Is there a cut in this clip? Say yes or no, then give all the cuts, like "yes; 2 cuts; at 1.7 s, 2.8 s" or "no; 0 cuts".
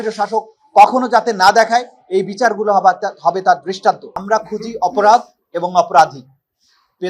yes; 1 cut; at 4.1 s